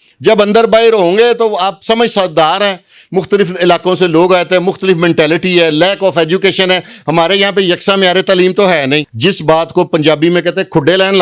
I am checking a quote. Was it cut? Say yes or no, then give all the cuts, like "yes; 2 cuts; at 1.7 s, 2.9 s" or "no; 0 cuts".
yes; 1 cut; at 9.1 s